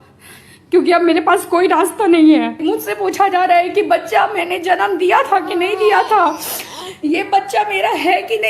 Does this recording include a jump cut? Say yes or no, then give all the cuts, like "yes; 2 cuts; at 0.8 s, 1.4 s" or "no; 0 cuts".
yes; 1 cut; at 2.6 s